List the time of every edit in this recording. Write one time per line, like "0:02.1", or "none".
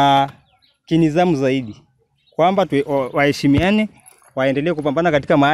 none